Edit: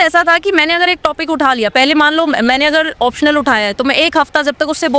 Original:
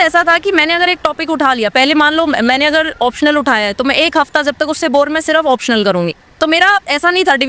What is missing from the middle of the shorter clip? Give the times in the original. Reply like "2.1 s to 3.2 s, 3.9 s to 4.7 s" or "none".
none